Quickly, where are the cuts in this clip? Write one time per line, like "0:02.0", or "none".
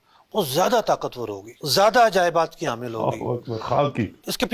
none